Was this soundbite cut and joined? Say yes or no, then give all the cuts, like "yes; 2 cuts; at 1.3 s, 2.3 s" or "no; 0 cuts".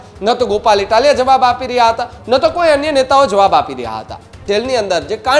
yes; 1 cut; at 4.4 s